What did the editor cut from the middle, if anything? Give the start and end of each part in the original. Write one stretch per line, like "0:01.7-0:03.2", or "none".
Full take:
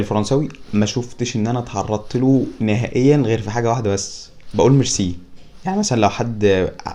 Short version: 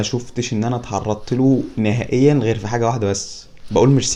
none

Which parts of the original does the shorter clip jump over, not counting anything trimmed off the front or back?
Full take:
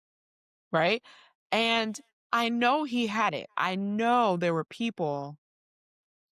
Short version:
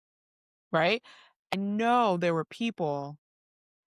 0:01.5-0:03.7

